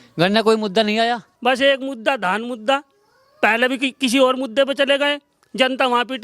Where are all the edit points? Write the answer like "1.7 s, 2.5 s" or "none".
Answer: 1.3 s

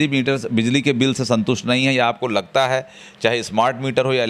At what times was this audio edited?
none

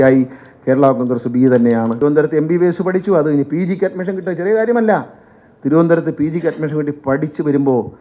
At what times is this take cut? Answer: 1.9 s

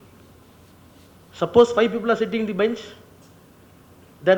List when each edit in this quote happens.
none

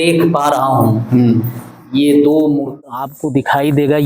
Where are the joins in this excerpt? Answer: 3.1 s

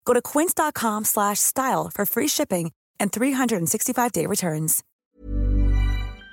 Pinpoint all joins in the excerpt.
4.8 s

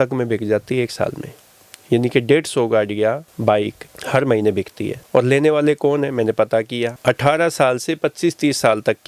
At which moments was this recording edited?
none

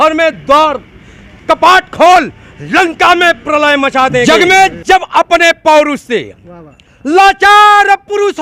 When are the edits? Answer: 4.2 s

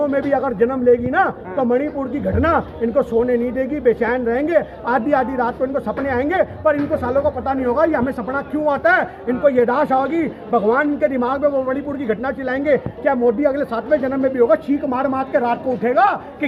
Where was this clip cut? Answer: none

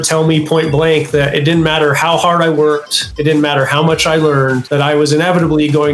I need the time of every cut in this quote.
3.1 s, 4.6 s

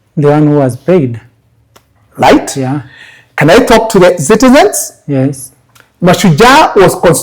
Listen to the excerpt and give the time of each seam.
none

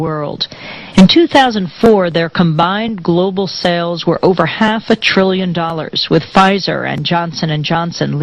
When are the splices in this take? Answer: 5.1 s

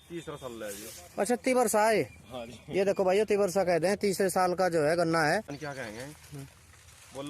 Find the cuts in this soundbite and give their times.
5.6 s

